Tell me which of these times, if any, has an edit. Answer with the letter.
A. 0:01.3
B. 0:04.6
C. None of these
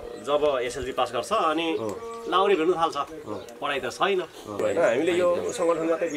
B